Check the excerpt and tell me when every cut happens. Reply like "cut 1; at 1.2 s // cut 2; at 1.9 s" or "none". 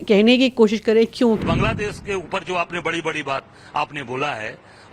cut 1; at 1.4 s